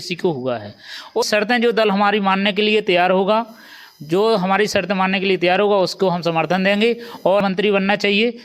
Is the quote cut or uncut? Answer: cut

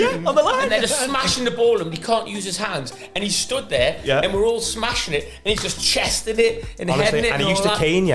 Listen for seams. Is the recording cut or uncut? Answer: uncut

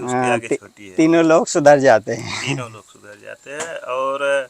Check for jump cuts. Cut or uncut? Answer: uncut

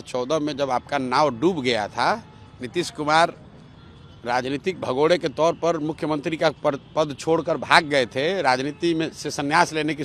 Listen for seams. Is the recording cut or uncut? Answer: uncut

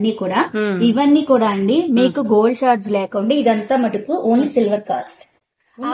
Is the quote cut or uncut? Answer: uncut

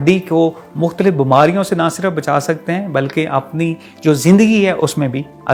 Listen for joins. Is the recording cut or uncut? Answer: uncut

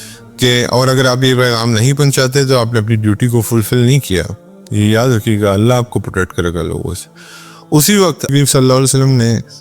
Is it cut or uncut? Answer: cut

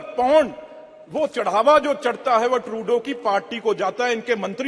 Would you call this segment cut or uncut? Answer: uncut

